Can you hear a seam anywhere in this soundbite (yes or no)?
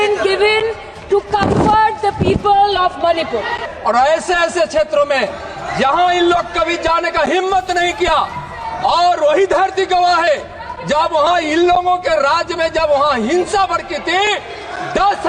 yes